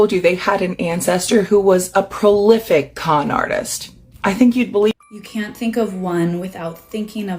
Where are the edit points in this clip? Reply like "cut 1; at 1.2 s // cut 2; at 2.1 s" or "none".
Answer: cut 1; at 4.9 s